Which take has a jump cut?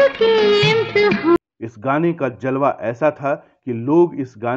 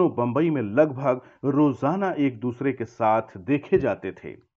first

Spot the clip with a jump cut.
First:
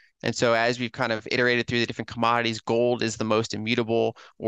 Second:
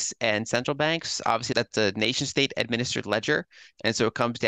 second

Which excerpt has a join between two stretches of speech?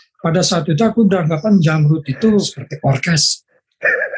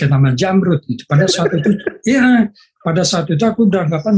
first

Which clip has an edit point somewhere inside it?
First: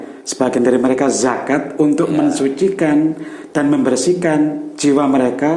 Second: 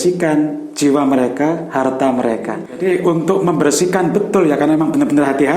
second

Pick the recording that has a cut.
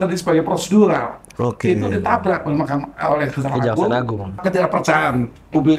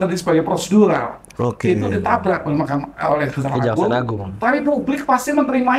first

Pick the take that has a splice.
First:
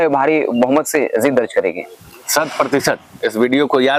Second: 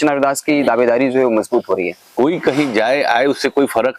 second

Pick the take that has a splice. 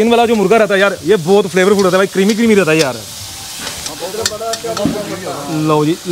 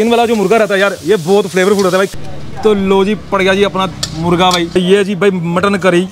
second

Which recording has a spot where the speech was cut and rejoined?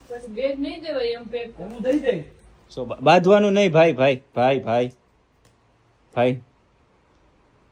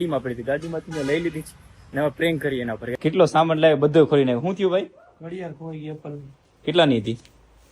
second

